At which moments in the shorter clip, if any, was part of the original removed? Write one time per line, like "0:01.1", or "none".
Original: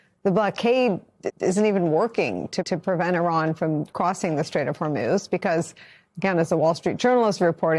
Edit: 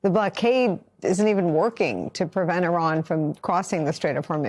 0:00.9
0:02.2